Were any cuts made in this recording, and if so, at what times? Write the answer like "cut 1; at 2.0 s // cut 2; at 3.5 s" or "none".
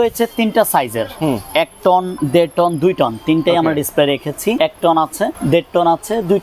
cut 1; at 2.2 s // cut 2; at 4.6 s // cut 3; at 5.4 s